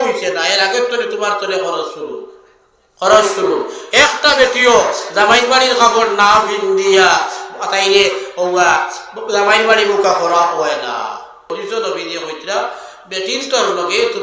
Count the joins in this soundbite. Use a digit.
1